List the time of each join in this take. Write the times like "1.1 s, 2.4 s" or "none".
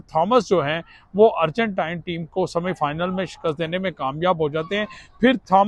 none